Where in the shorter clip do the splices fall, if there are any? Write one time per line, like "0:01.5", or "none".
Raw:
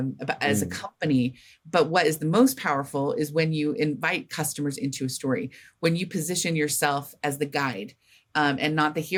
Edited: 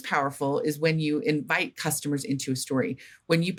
none